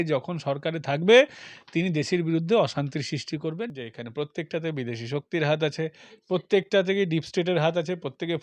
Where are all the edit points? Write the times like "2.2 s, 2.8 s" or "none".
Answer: 3.7 s